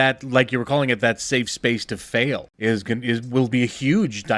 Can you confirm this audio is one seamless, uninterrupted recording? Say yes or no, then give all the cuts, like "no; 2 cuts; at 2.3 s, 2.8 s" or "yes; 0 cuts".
no; 1 cut; at 2.5 s